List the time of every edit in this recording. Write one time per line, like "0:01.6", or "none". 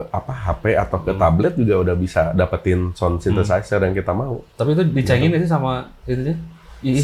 none